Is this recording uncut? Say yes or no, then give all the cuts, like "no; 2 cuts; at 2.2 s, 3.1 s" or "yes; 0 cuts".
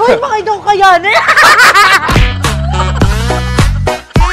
no; 1 cut; at 2.2 s